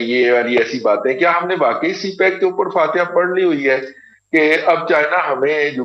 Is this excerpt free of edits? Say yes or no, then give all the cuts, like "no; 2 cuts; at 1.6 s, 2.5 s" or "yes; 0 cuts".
yes; 0 cuts